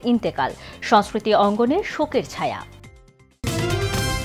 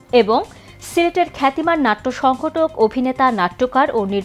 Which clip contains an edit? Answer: first; 1 cut; at 3.4 s

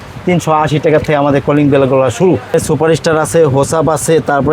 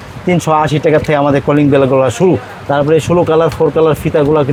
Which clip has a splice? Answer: first; 1 cut; at 2.5 s

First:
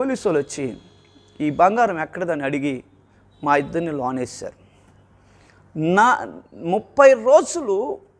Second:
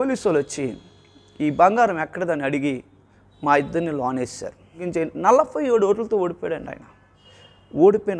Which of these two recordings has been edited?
second; 1 cut; at 4.8 s

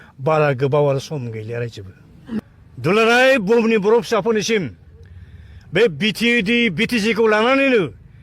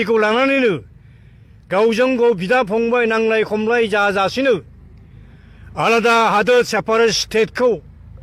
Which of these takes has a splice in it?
first; 1 cut; at 2.4 s

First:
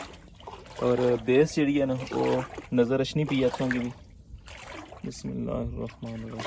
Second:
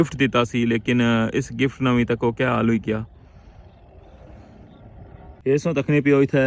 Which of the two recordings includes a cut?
second; 1 cut; at 5.3 s

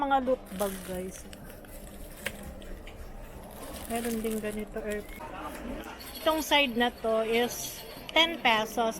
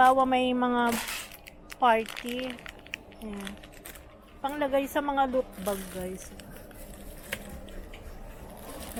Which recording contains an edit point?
first; 1 cut; at 5.2 s

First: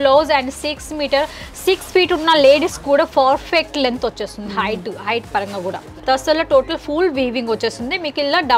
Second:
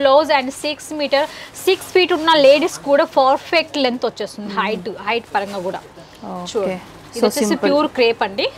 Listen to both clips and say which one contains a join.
first; 1 cut; at 5.9 s

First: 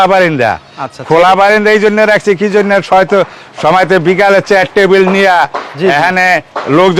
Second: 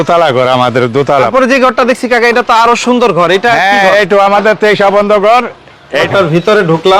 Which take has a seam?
second; 2 cuts; at 1.1 s, 6.0 s

